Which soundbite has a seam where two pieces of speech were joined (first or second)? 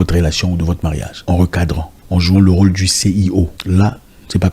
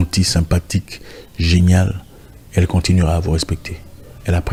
first